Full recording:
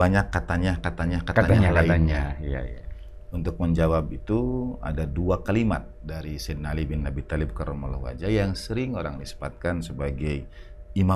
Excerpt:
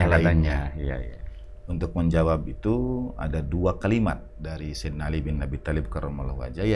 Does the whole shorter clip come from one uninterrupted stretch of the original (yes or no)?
yes